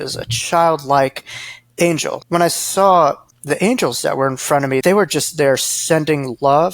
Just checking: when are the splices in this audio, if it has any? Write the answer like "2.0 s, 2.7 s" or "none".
2.2 s, 4.8 s